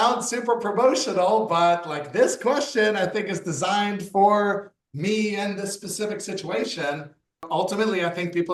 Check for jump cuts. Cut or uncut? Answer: uncut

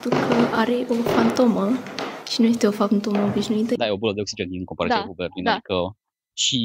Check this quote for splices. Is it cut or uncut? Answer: cut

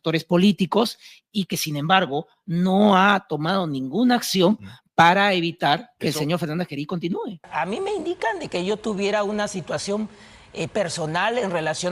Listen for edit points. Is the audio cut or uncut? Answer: cut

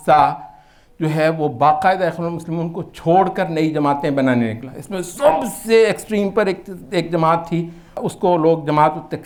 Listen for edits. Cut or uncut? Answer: uncut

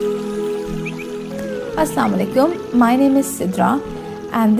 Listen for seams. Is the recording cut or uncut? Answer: cut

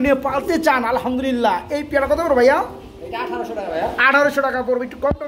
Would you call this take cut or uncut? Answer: uncut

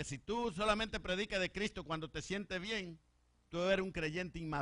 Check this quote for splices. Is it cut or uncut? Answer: uncut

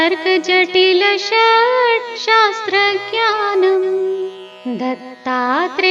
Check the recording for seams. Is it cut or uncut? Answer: cut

